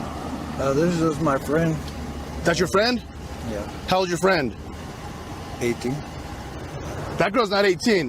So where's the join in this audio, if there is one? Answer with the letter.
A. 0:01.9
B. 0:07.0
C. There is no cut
B